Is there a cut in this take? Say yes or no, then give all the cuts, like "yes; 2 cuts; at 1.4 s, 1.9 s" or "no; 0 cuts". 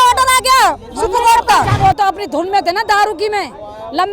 yes; 1 cut; at 1.7 s